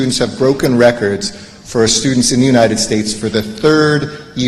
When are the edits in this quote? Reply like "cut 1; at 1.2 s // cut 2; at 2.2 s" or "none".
none